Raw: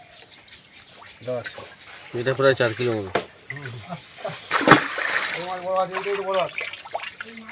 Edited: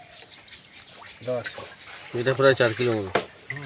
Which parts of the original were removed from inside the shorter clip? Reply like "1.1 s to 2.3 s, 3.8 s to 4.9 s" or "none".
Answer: none